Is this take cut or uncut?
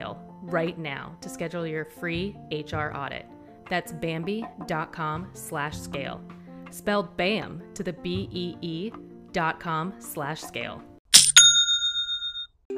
cut